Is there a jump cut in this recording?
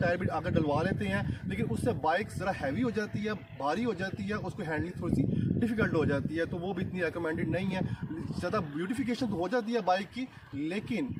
no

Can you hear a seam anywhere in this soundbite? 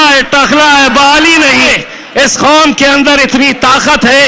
yes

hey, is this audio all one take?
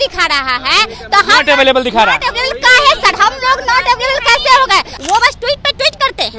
no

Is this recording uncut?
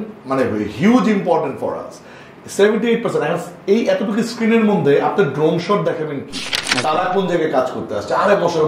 no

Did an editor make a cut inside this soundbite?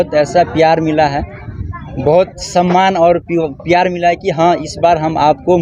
no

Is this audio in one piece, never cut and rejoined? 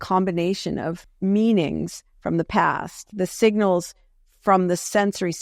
no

